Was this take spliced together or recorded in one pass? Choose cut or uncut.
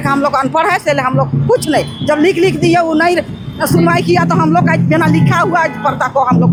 uncut